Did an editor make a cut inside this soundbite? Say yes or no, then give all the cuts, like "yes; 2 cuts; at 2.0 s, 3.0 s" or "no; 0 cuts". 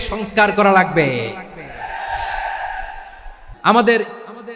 no; 0 cuts